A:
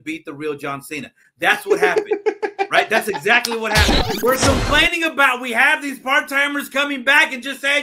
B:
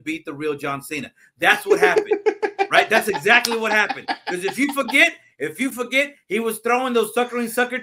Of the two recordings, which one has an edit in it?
A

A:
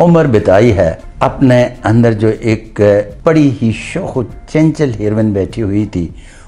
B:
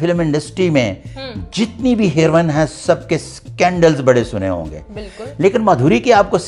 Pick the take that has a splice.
A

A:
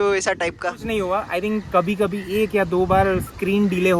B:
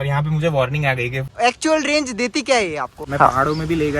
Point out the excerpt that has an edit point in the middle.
B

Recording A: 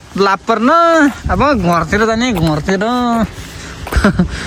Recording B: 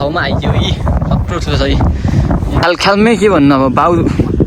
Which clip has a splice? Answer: B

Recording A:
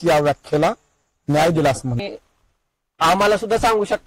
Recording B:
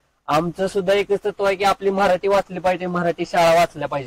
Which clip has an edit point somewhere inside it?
A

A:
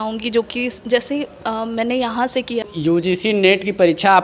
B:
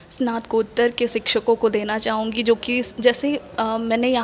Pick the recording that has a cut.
A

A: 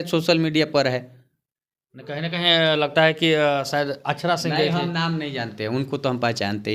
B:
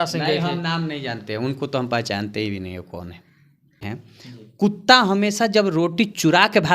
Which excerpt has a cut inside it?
B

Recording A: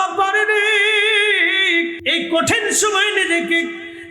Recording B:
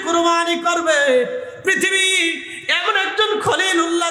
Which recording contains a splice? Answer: A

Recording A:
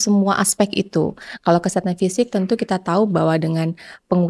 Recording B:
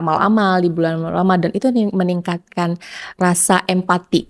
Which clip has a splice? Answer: B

